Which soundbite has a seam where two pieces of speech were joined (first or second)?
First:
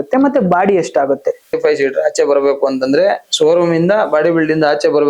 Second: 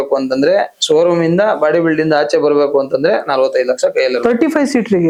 first